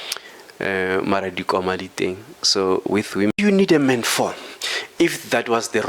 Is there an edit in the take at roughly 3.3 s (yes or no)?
yes